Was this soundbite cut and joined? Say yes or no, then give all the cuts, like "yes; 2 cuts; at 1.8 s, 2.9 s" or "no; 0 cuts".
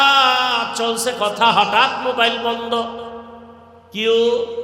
no; 0 cuts